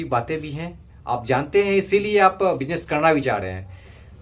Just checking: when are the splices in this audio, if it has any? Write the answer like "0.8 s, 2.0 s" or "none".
none